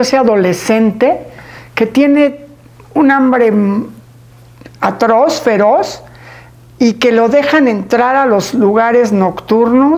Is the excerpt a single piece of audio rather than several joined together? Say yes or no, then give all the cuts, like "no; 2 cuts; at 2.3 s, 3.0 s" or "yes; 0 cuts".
yes; 0 cuts